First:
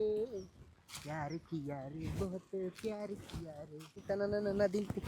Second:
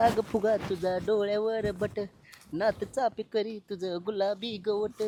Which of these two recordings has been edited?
first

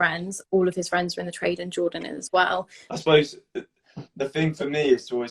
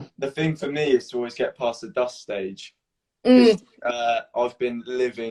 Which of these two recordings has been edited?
first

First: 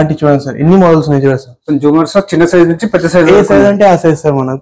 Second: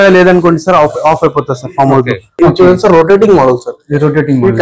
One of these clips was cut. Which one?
second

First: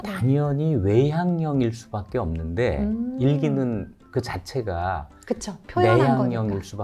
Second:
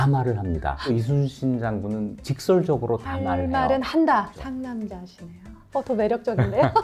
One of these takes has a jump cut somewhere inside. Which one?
second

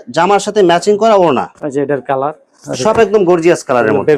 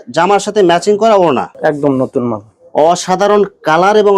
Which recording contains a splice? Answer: second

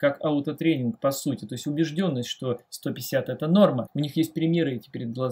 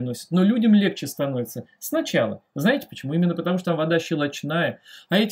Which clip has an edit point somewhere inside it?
first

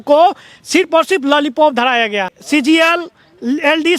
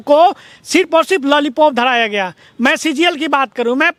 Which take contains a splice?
first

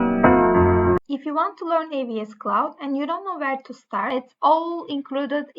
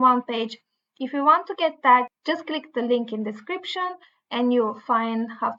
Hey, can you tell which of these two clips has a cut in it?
first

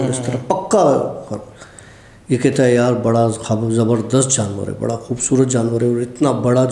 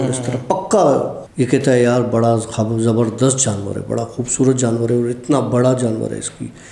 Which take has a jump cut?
second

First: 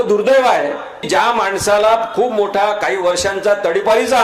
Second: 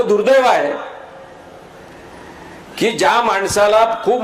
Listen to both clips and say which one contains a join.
first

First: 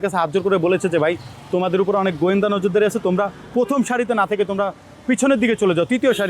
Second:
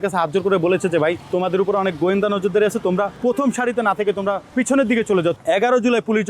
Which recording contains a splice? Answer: second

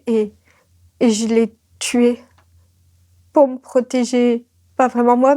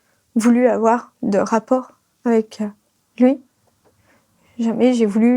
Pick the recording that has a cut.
second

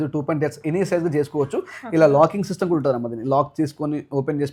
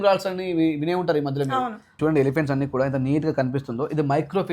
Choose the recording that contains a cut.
second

